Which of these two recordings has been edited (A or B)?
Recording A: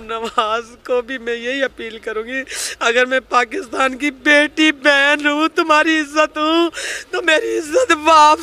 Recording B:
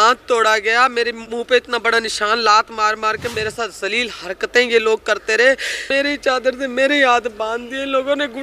B